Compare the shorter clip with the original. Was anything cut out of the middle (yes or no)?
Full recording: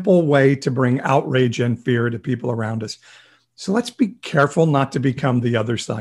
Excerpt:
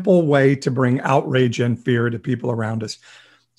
no